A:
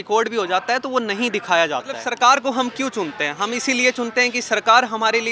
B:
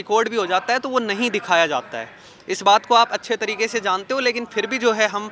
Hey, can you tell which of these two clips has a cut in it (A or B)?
A